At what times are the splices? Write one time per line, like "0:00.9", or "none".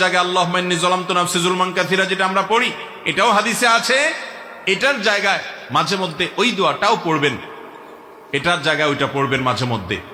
none